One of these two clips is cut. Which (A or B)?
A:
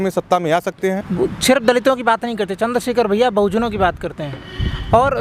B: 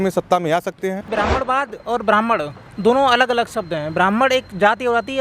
B